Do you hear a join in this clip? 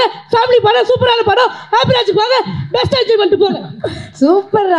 no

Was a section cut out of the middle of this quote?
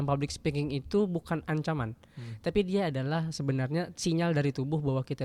no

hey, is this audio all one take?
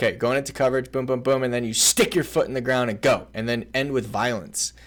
yes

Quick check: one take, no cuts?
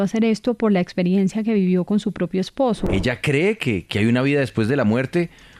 no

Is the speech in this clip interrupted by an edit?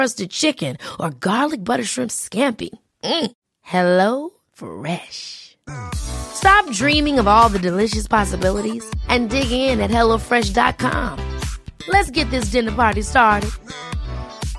no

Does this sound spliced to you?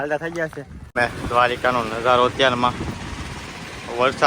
yes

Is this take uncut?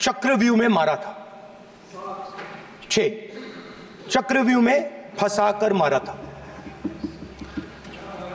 yes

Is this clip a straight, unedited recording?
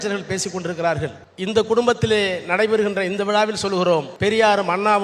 no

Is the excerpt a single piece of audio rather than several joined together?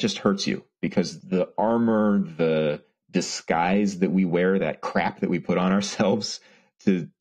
no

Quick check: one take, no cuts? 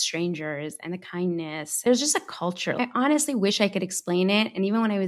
no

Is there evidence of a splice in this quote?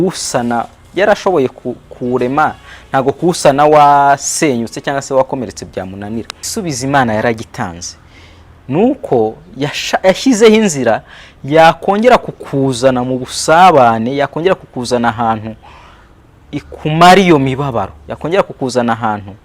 yes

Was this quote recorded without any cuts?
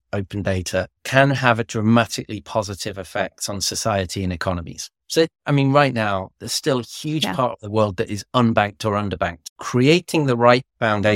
yes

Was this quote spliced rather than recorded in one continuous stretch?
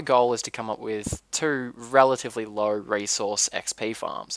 yes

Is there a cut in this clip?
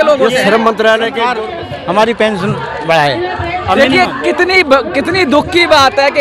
yes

